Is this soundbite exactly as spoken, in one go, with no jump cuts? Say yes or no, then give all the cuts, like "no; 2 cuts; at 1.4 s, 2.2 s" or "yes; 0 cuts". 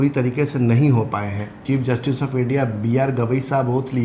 no; 1 cut; at 1.6 s